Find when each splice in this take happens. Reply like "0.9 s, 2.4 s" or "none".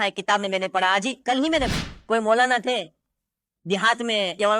1.7 s